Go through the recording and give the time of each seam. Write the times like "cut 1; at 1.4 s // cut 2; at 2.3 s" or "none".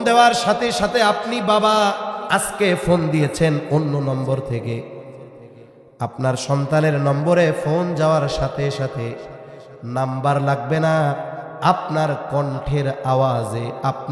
none